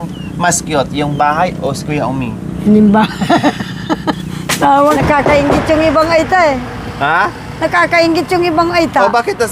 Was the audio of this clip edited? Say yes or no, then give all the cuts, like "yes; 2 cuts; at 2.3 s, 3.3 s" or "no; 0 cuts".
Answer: yes; 1 cut; at 4.8 s